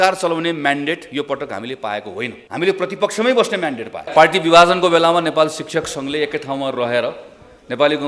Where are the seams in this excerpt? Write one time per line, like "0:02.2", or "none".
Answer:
0:02.4
0:04.1